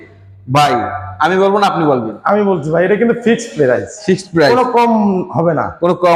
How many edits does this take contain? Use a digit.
0